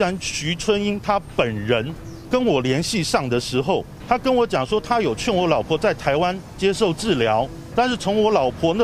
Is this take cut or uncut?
cut